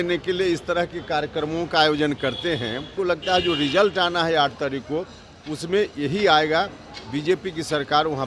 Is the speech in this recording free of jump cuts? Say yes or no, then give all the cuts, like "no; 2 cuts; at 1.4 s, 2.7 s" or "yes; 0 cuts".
no; 1 cut; at 2.9 s